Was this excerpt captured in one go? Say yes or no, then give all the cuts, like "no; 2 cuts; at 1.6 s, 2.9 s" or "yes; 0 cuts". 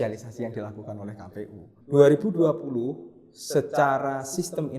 no; 1 cut; at 1.7 s